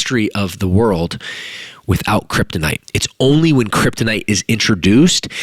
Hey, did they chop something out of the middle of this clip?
yes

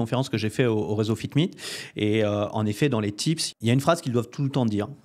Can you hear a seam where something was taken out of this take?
yes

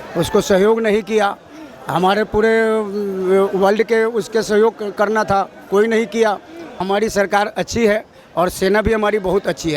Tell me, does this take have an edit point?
yes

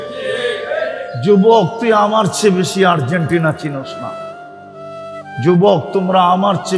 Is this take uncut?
no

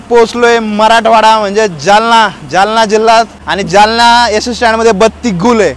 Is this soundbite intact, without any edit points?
no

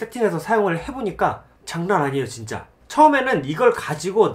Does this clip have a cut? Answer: yes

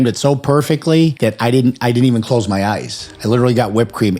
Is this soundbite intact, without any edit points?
no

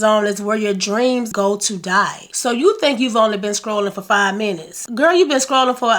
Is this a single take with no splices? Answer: no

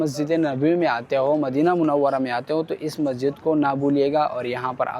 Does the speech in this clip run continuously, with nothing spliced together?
yes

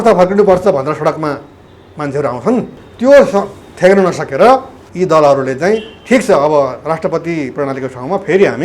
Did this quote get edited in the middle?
yes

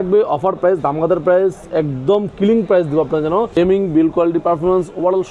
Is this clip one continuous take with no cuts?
no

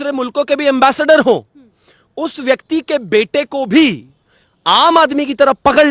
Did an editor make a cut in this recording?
no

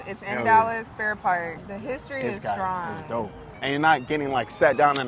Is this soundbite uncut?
no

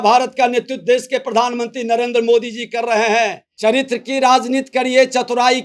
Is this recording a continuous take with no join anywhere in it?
no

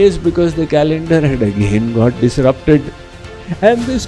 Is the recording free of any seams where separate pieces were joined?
no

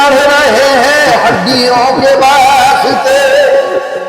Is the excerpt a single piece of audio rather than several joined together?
yes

